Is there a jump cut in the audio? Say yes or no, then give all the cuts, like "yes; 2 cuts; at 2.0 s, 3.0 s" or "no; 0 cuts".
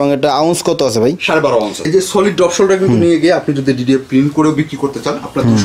yes; 1 cut; at 1.8 s